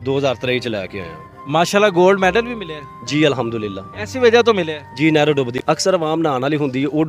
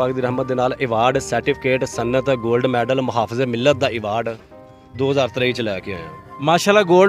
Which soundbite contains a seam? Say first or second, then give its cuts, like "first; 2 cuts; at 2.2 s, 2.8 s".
first; 1 cut; at 5.6 s